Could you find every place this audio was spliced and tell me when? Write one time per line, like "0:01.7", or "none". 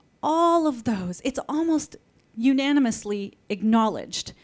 none